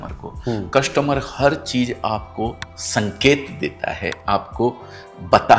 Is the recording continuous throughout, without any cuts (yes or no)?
yes